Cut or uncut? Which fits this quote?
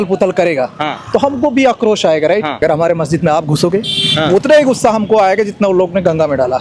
cut